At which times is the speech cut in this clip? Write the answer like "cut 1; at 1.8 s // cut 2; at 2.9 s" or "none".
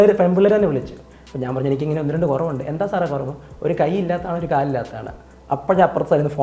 none